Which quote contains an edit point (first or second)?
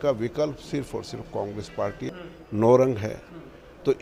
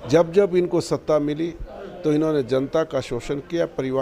first